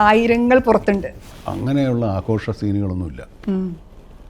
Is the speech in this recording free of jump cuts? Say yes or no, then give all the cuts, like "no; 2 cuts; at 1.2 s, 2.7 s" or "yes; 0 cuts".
no; 1 cut; at 1.2 s